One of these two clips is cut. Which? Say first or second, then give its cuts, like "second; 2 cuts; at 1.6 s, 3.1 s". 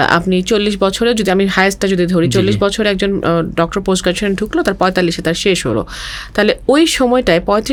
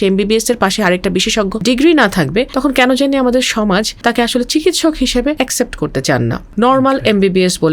second; 5 cuts; at 1.6 s, 2.5 s, 3.9 s, 5.4 s, 6.4 s